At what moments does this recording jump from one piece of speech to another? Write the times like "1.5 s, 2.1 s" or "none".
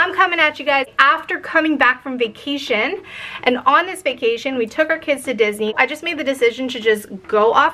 0.9 s, 5.7 s